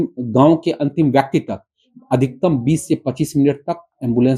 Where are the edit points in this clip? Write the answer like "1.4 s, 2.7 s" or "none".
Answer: none

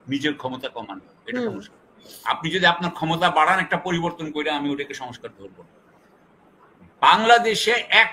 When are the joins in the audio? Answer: none

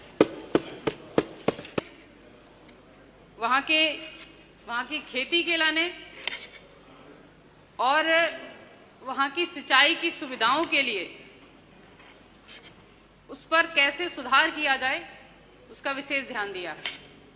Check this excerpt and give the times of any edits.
1.9 s

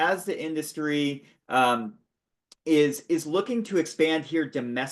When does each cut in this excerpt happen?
none

